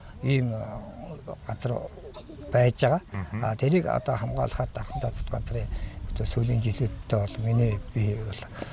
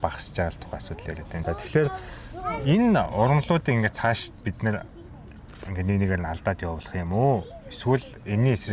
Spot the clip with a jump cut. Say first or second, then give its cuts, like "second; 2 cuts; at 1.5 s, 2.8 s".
second; 1 cut; at 1.4 s